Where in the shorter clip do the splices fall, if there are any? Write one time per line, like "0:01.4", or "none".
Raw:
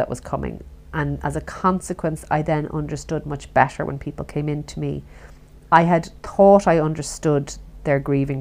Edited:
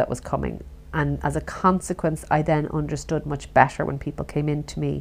none

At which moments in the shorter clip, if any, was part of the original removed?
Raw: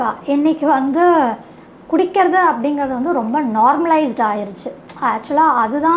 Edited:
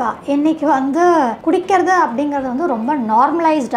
0:01.4

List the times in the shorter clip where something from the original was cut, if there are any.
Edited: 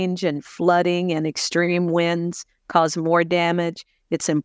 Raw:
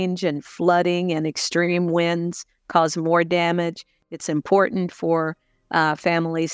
none

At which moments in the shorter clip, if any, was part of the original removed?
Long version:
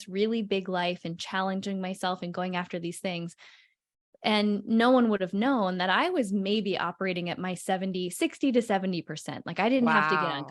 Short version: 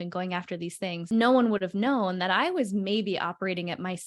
0:01.1

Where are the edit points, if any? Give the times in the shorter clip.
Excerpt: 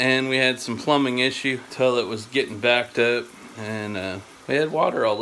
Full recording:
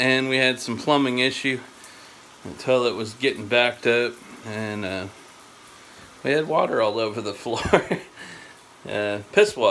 0:01.7
0:04.3

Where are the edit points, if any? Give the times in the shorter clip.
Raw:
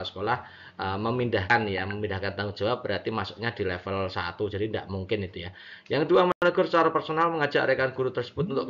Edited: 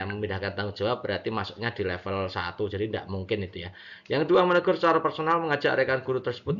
0:04.5

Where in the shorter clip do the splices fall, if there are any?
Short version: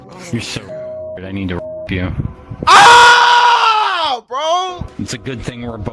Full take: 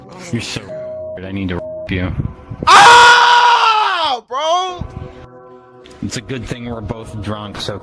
0:04.9

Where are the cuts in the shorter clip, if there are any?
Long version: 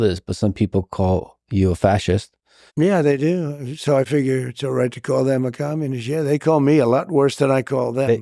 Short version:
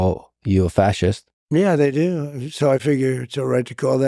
0:01.3

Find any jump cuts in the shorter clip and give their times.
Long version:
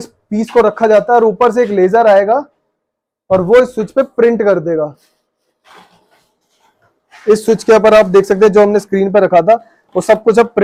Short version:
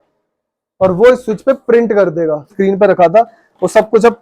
0:02.5

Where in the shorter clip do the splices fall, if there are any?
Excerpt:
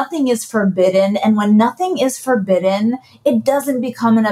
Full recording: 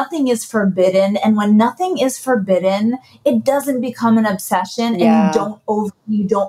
none

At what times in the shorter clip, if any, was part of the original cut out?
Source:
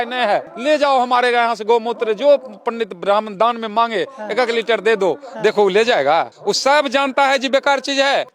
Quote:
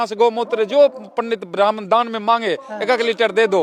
none

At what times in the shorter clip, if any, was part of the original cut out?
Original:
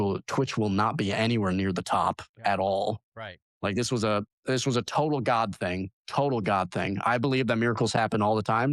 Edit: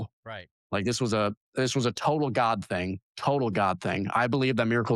none

